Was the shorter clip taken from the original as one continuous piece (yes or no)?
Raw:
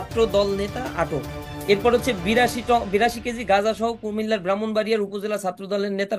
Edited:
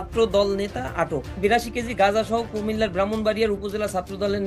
no